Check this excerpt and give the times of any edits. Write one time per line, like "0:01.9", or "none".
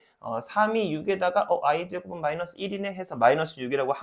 none